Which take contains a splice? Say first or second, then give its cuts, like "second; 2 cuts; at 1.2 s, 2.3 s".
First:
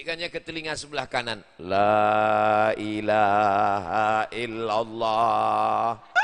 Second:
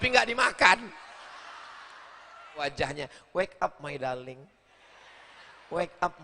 second; 1 cut; at 2.6 s